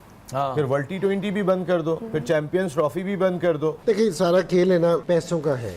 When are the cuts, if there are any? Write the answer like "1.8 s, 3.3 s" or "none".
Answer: 3.8 s